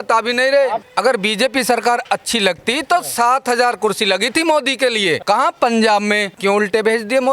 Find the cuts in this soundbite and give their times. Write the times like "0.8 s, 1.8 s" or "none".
0.8 s, 5.2 s, 6.3 s